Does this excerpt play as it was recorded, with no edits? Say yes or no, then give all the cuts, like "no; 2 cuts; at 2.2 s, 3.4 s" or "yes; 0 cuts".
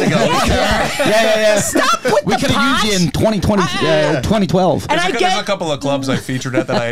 yes; 0 cuts